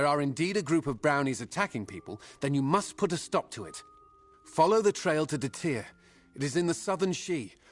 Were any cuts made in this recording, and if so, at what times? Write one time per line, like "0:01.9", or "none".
none